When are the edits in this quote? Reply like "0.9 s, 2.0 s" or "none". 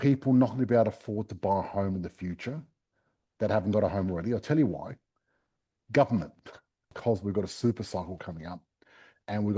6.8 s